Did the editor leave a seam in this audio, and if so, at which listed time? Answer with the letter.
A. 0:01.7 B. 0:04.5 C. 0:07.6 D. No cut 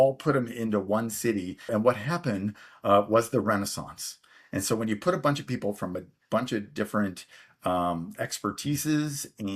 A